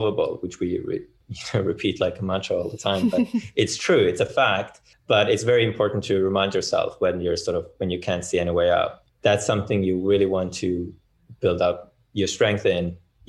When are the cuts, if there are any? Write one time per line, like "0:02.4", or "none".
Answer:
0:09.0